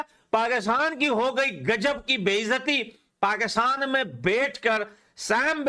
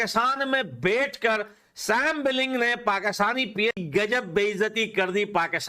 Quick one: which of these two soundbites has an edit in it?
second; 1 cut; at 3.8 s

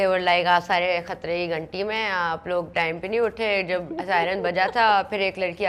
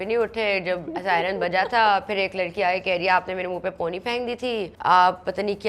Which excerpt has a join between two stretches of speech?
second; 1 cut; at 4.7 s

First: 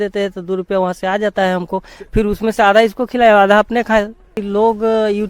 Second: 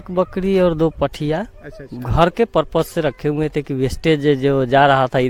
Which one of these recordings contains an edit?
first; 1 cut; at 4.4 s

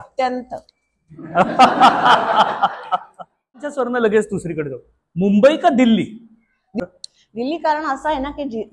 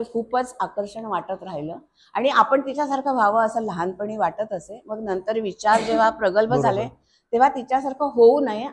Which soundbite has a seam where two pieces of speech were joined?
first; 2 cuts; at 3.8 s, 6.8 s

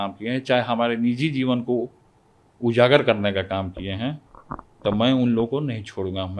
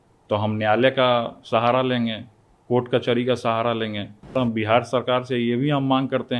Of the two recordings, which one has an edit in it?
second; 1 cut; at 4.4 s

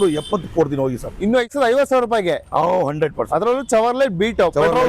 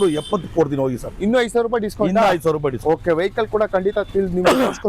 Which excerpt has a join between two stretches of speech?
first; 1 cut; at 1.5 s

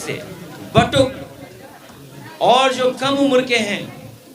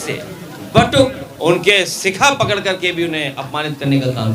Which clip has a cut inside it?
second; 1 cut; at 1.3 s

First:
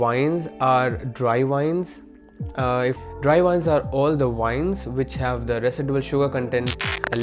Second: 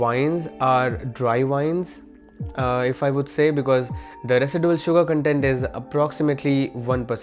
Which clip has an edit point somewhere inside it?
first; 1 cut; at 3.0 s

